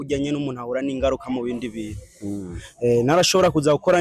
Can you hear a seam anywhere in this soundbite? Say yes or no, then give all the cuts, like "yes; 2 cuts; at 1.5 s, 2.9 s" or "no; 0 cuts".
no; 0 cuts